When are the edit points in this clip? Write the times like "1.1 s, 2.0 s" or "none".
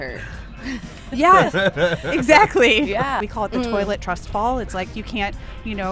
3.2 s